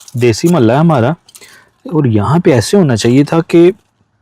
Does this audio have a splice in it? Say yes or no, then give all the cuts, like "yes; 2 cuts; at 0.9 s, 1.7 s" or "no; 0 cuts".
no; 0 cuts